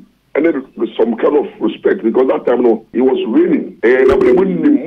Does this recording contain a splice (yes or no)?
yes